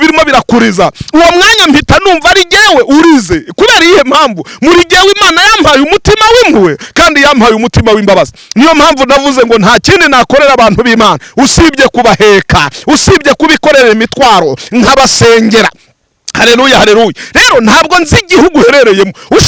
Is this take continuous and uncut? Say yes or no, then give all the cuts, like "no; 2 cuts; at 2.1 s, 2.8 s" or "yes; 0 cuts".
yes; 0 cuts